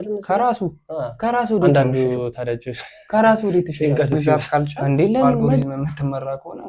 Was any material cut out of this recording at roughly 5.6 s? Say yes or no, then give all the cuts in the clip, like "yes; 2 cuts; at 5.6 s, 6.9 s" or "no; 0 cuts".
yes; 1 cut; at 5.6 s